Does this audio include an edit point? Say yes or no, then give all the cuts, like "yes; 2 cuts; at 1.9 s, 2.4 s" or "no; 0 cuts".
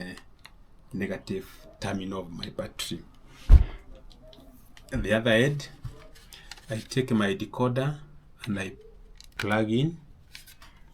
yes; 1 cut; at 9.3 s